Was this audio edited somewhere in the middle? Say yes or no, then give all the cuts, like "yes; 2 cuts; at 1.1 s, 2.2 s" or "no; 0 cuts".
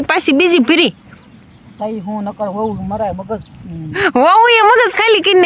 yes; 1 cut; at 3.9 s